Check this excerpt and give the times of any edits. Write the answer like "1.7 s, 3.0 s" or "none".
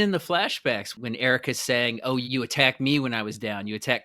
0.9 s, 2.2 s